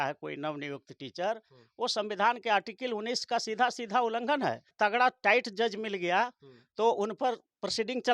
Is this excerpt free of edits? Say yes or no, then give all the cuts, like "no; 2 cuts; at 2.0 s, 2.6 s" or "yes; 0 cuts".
no; 1 cut; at 4.7 s